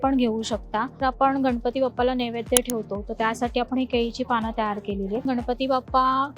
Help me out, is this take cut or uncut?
cut